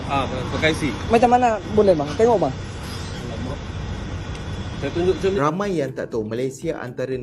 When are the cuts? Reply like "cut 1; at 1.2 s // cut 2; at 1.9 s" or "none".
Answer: cut 1; at 5.4 s